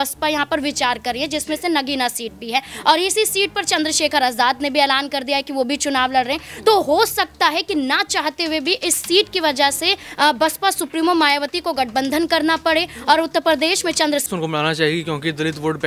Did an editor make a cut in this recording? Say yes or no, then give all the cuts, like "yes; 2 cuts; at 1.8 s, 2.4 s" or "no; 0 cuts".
yes; 1 cut; at 14.3 s